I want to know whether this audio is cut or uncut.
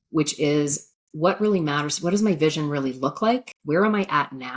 cut